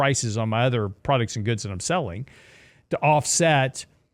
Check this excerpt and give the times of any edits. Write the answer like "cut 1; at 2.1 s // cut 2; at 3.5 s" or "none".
cut 1; at 1.0 s